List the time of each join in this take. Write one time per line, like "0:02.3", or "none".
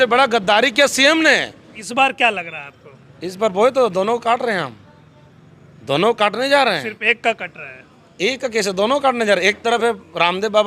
0:01.8